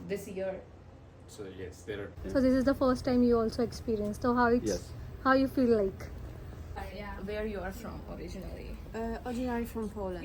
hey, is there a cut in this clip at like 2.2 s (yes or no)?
yes